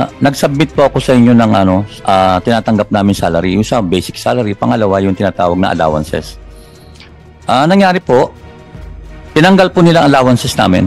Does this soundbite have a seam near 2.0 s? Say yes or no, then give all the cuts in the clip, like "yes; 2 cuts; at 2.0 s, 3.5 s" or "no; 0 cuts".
no; 0 cuts